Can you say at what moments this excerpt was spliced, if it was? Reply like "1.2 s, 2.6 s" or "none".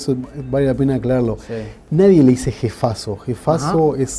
2.9 s